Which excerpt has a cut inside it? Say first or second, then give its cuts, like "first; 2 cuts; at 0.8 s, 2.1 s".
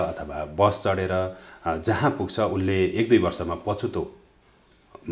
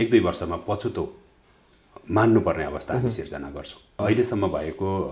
second; 1 cut; at 4.0 s